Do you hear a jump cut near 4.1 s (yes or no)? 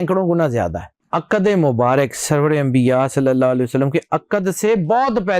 no